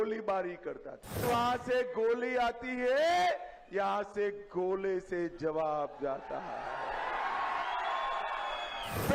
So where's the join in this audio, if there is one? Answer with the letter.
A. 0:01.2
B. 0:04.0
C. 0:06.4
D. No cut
A